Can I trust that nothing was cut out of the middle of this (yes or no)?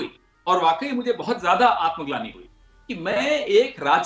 yes